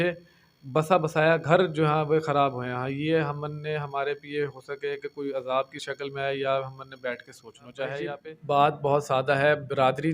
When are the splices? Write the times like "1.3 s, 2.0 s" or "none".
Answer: 8.2 s